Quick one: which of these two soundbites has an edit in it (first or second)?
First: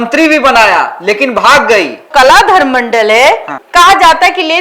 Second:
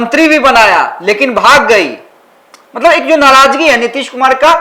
first